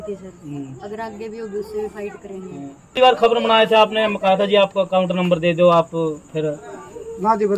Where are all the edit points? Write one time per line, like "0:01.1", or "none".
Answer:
0:02.8